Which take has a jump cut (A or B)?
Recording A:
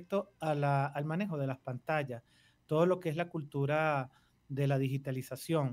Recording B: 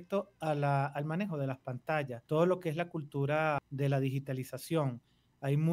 B